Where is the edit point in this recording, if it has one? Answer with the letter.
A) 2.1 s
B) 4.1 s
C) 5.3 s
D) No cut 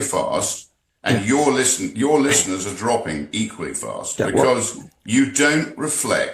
B